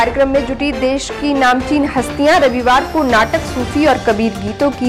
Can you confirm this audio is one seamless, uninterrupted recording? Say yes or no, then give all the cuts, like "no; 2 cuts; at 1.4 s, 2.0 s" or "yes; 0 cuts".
yes; 0 cuts